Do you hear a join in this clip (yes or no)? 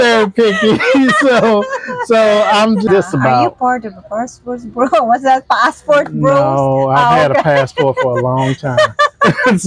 yes